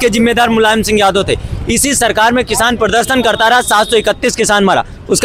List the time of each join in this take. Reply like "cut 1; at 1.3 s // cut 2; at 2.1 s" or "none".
none